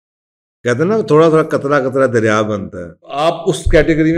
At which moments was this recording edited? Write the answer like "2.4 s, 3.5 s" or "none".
3.1 s